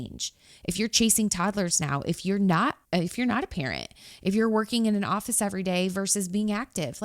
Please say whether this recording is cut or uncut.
cut